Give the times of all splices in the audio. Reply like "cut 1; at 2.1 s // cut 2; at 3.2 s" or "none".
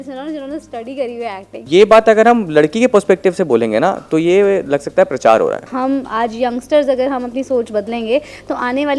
cut 1; at 1.5 s // cut 2; at 5.7 s